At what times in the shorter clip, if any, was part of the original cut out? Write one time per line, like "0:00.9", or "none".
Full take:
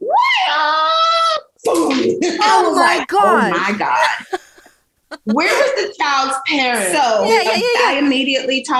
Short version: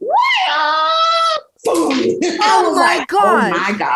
none